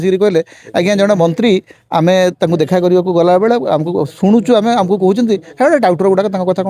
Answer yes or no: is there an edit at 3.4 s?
no